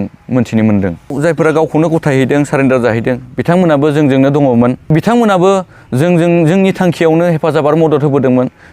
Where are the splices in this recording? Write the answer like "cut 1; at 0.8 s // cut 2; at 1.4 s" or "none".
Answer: cut 1; at 1.2 s // cut 2; at 4.9 s